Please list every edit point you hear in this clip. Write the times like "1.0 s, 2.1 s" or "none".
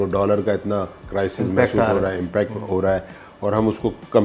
none